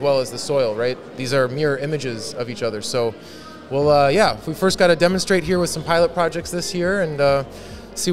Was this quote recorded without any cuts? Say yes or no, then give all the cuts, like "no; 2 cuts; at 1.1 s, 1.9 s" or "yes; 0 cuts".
yes; 0 cuts